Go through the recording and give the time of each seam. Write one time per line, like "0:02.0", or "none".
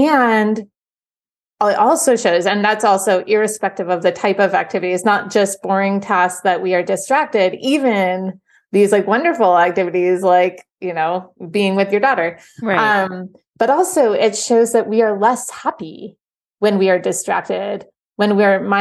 0:11.3